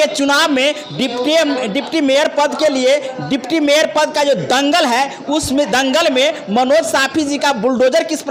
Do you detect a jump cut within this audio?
no; 0 cuts

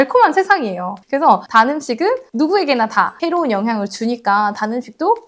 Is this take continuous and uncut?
yes; 0 cuts

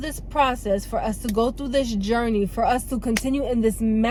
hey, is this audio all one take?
yes; 0 cuts

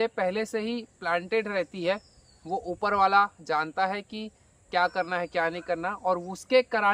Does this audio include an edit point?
no; 0 cuts

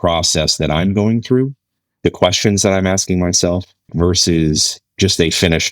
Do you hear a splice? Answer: yes; 1 cut; at 3.9 s

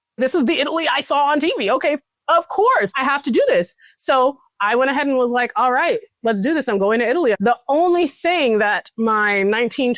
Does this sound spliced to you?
yes; 1 cut; at 7.4 s

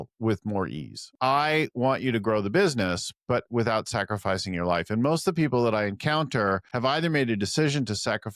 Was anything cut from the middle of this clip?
yes; 2 cuts; at 1.1 s, 6.7 s

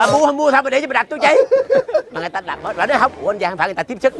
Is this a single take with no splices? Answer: yes; 0 cuts

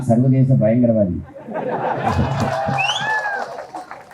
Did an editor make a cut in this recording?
no; 0 cuts

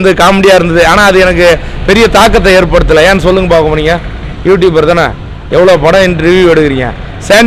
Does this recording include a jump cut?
no; 0 cuts

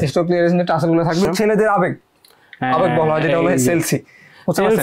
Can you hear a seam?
yes; 1 cut; at 1.3 s

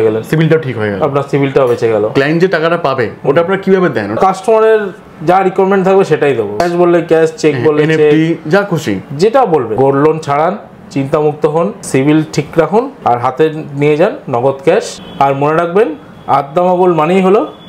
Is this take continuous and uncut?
no; 7 cuts; at 2.1 s, 4.2 s, 6.6 s, 9.7 s, 11.8 s, 12.9 s, 15.0 s

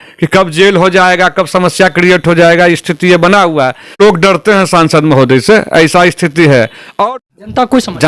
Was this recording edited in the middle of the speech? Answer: yes; 2 cuts; at 4.0 s, 7.1 s

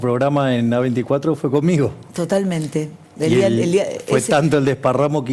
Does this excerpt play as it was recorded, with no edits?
yes; 0 cuts

